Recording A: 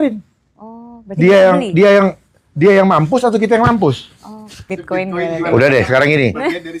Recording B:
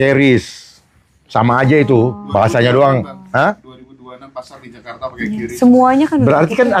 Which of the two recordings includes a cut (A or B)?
A